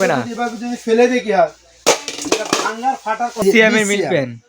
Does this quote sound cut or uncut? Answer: cut